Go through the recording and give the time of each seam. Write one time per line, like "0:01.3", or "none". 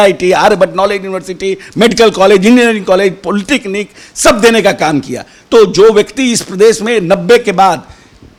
none